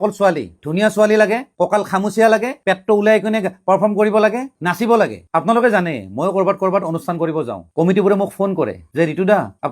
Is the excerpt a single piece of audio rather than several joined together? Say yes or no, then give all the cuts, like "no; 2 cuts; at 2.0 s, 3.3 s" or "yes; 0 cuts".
yes; 0 cuts